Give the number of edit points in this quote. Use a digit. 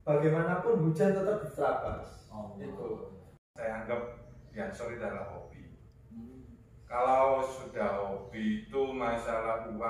1